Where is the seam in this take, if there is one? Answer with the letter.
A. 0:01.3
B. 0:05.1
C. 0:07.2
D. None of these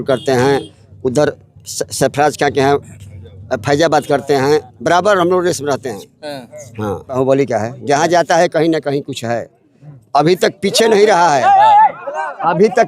C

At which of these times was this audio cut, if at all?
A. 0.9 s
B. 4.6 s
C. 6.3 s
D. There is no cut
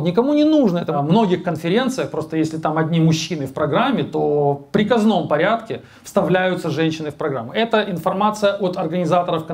A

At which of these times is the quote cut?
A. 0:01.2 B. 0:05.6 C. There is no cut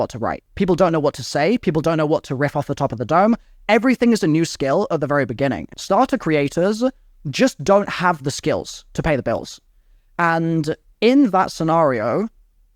B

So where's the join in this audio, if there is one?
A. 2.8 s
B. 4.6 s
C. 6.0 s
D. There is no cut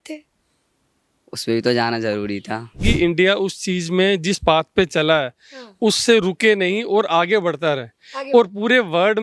A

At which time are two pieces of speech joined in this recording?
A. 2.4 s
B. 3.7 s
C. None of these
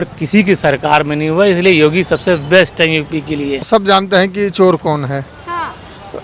B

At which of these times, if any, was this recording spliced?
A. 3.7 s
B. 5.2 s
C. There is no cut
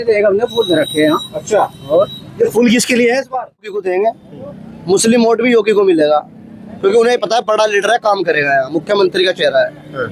A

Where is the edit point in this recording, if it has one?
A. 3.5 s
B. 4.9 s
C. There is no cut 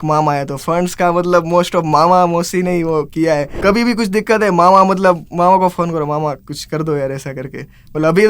A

